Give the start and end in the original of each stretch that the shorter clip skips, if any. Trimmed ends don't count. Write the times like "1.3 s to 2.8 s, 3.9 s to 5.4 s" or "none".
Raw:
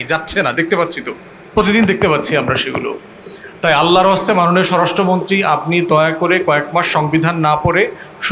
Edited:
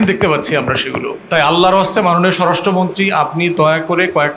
2.9 s to 3.5 s